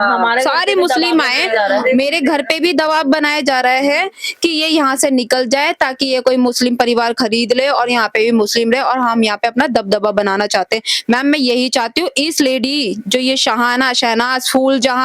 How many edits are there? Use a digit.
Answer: 0